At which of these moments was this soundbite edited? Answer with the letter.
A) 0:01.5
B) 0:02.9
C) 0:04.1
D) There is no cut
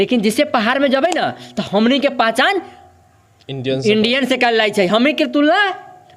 D